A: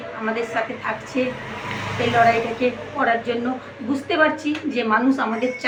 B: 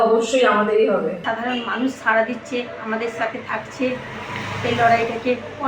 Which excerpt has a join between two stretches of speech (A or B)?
B